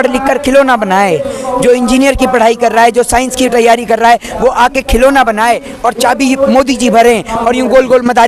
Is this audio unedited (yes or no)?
yes